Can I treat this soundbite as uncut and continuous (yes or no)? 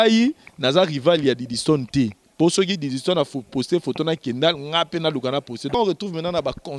no